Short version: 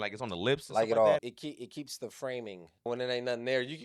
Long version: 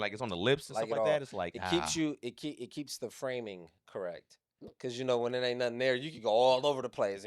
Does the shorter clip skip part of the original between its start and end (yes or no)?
yes